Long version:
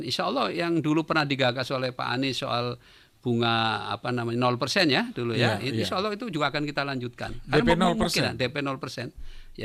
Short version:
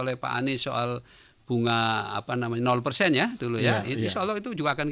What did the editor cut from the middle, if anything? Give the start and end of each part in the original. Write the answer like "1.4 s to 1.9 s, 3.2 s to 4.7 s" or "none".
none